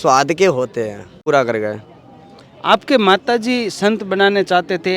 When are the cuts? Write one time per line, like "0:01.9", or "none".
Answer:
0:01.2